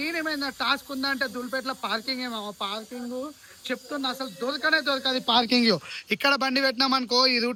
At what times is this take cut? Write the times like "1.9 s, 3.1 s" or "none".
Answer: none